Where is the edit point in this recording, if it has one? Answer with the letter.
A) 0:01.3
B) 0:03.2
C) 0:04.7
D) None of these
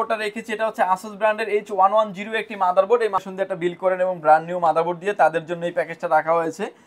B